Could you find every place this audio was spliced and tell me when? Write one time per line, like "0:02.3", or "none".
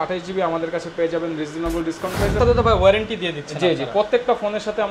0:02.4